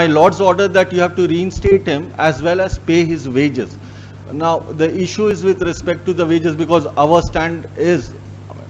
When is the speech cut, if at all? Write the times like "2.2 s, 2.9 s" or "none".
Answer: none